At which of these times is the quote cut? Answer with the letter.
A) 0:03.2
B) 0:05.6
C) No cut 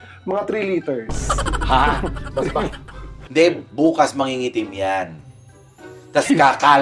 A